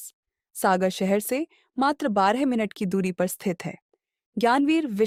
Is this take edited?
no; 0 cuts

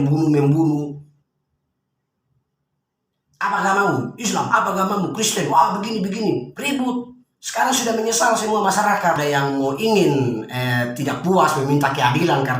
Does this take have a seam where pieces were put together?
yes; 1 cut; at 9.2 s

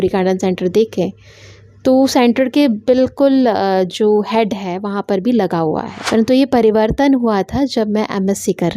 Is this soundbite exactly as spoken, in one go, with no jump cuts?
no; 1 cut; at 6.0 s

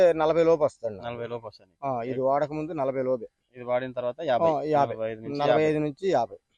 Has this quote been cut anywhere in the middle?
no; 0 cuts

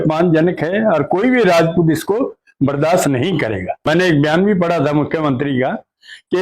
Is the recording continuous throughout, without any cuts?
no; 1 cut; at 3.9 s

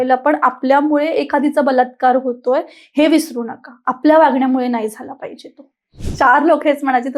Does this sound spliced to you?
yes; 1 cut; at 6.0 s

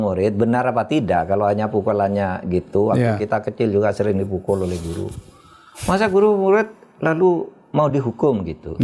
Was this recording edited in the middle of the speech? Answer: no; 0 cuts

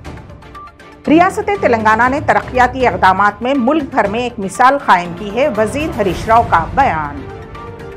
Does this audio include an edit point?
yes; 1 cut; at 1.0 s

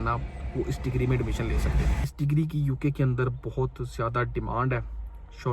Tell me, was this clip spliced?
yes; 1 cut; at 2.1 s

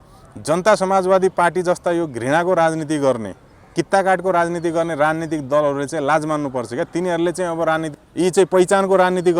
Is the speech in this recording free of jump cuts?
no; 1 cut; at 7.9 s

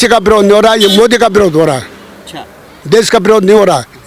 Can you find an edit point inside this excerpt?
no; 0 cuts

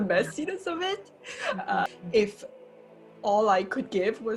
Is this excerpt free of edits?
no; 1 cut; at 1.9 s

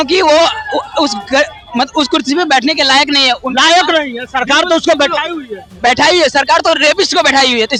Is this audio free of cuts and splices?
yes; 0 cuts

